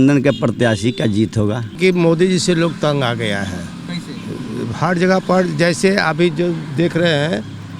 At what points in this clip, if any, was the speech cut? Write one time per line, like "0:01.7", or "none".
0:01.8

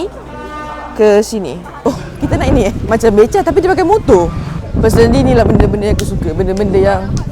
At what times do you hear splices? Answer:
0:01.7
0:02.8
0:04.6

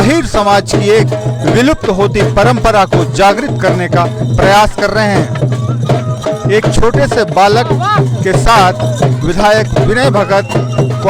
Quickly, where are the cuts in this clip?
none

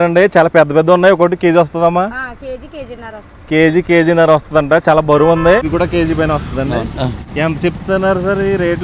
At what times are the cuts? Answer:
0:05.6
0:07.2

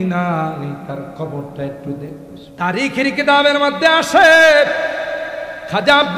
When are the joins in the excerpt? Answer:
0:02.4

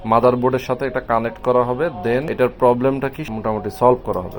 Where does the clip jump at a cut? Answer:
0:02.3
0:03.2

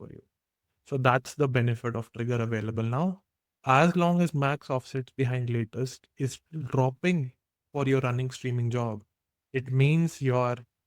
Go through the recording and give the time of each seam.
0:03.6

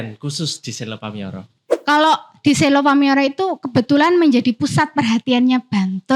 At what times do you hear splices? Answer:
0:01.7

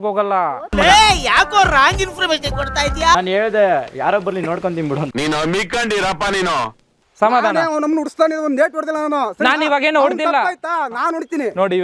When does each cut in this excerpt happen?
0:03.2
0:07.0

